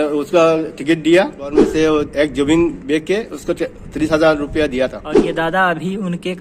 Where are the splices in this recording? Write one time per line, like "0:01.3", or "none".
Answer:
0:01.5
0:05.1